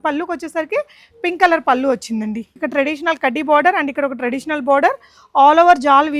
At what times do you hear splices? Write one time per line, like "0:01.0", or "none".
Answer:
0:02.6